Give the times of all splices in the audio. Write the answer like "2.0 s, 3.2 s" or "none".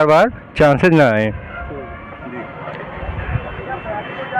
none